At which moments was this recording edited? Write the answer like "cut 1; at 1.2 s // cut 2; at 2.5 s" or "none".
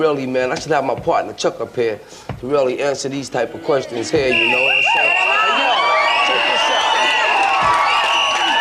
none